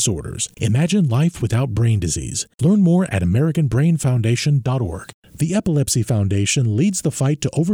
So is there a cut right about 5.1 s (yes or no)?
yes